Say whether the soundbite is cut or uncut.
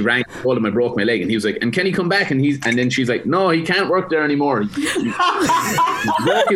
uncut